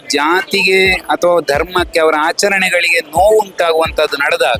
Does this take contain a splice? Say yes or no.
no